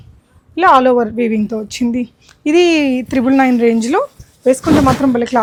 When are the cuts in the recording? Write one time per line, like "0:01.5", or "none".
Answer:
none